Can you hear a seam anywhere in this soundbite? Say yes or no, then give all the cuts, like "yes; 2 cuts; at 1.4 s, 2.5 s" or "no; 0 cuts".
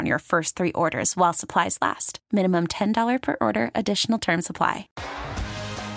yes; 1 cut; at 4.9 s